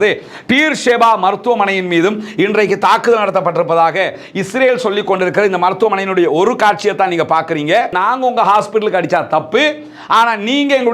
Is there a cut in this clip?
yes; 1 cut; at 7.9 s

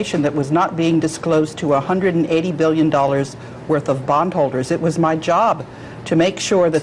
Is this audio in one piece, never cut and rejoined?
no; 1 cut; at 3.4 s

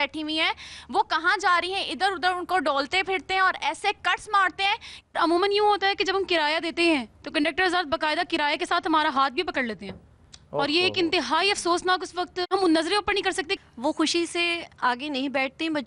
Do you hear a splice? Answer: yes; 2 cuts; at 4.9 s, 13.6 s

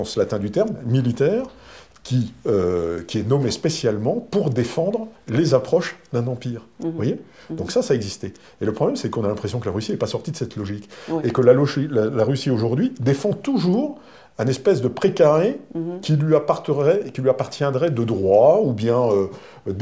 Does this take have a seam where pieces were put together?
no; 0 cuts

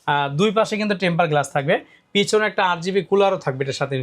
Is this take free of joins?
yes; 0 cuts

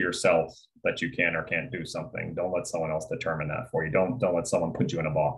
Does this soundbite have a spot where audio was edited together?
no; 0 cuts

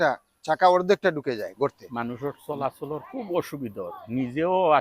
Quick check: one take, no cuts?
no; 1 cut; at 1.9 s

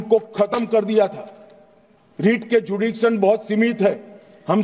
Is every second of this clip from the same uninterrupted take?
yes; 0 cuts

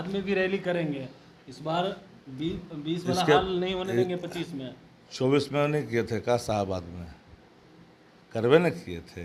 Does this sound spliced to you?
no; 0 cuts

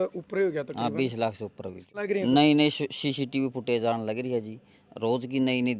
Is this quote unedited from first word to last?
no; 1 cut; at 2.1 s

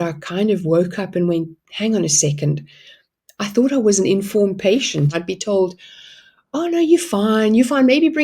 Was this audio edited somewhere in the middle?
yes; 1 cut; at 5.1 s

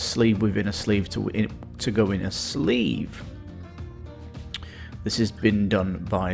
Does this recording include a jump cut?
no; 0 cuts

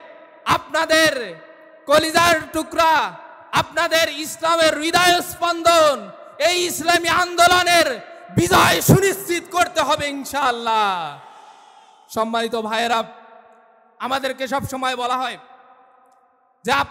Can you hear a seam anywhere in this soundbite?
no; 0 cuts

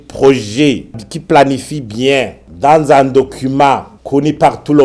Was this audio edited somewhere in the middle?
yes; 1 cut; at 1.0 s

